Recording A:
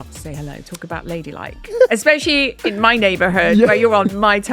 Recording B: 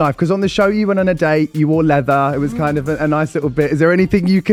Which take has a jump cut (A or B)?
A